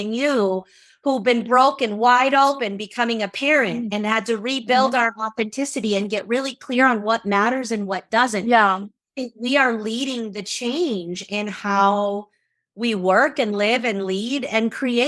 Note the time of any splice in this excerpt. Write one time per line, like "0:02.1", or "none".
none